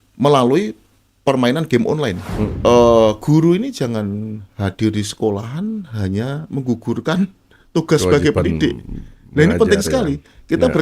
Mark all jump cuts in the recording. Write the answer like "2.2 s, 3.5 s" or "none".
2.5 s